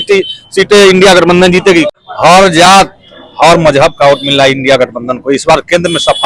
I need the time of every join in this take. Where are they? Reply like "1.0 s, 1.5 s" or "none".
1.9 s